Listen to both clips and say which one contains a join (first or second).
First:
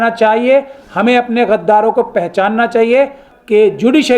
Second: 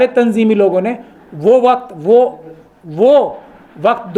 first